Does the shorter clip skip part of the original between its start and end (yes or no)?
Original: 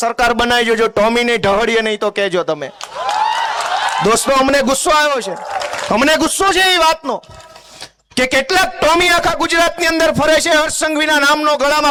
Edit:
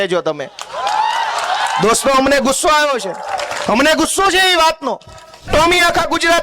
yes